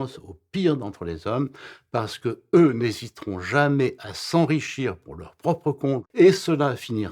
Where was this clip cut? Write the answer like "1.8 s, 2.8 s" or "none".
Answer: 6.1 s